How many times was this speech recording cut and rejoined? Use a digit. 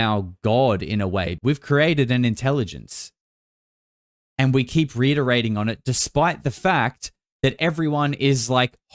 1